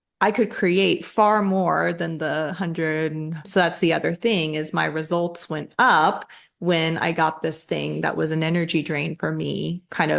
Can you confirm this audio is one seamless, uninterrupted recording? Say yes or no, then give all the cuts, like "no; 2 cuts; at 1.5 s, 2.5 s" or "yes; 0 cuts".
no; 1 cut; at 3.5 s